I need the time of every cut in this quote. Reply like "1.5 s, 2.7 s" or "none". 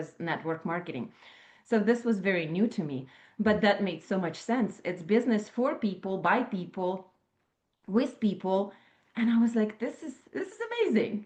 none